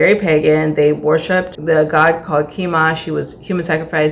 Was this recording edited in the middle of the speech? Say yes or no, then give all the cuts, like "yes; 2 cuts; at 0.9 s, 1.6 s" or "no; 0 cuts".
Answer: yes; 1 cut; at 1.5 s